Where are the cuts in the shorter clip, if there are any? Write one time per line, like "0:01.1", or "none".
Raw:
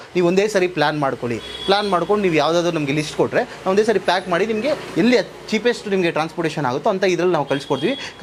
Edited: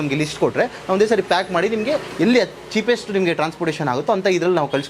none

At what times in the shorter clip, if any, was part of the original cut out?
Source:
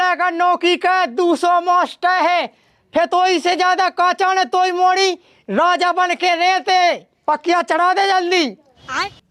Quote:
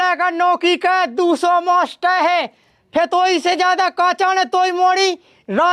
none

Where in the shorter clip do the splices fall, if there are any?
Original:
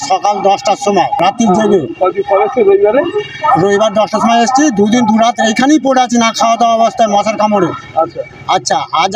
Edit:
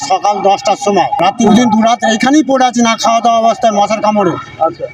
0:01.5

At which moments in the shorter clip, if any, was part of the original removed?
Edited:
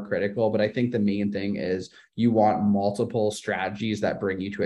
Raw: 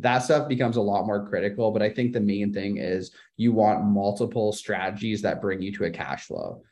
none

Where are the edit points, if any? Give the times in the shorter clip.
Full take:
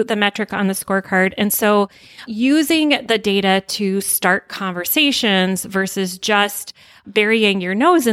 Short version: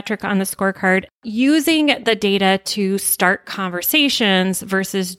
0:01.0

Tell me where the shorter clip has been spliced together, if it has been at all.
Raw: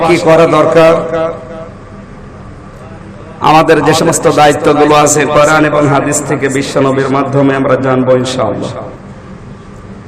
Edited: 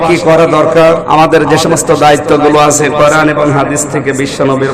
0:01.0

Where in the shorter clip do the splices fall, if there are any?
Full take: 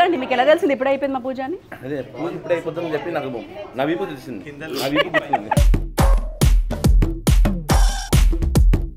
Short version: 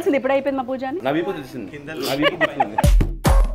0:01.0

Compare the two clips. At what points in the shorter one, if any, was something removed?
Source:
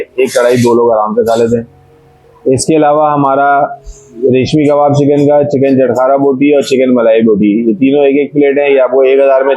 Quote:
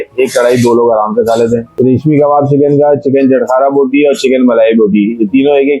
0:01.7

